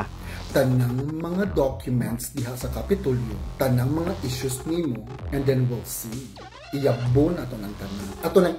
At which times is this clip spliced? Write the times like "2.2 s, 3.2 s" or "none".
none